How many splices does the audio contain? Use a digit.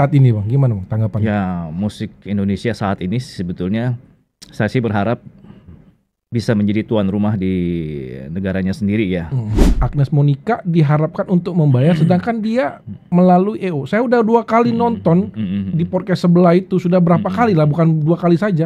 1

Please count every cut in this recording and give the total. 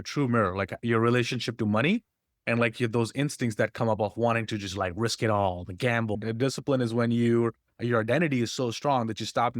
1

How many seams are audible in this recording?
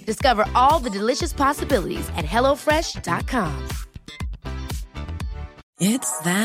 1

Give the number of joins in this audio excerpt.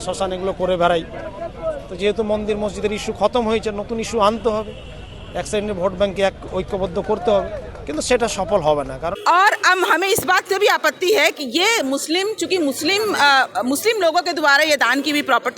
1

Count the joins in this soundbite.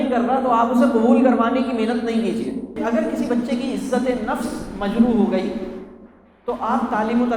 1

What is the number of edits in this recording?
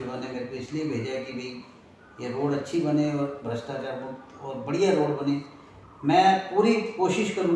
0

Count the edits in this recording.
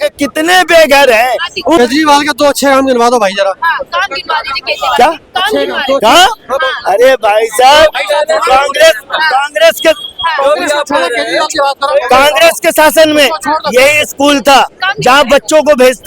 1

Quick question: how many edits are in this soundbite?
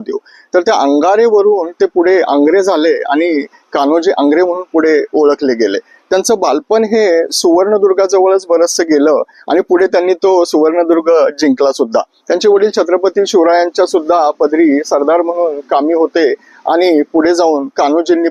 0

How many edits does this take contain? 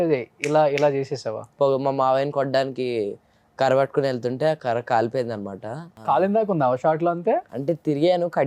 3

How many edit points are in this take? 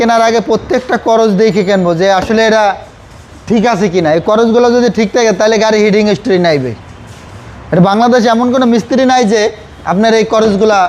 0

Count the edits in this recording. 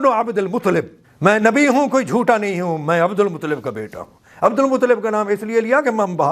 1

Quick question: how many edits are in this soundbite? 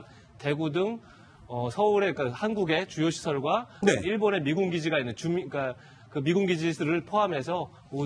1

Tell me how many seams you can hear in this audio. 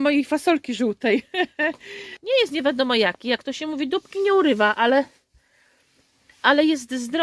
1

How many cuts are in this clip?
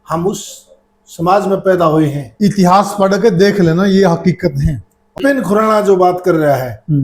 1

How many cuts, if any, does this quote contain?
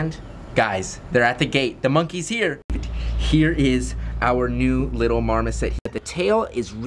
2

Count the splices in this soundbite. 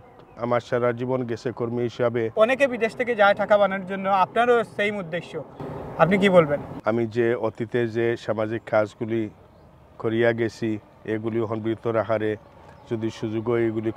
2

